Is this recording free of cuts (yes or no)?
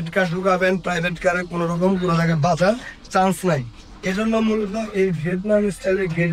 yes